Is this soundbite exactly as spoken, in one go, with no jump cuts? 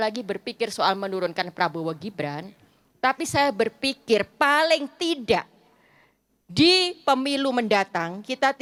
yes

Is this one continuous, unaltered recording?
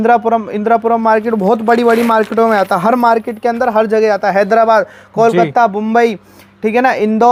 yes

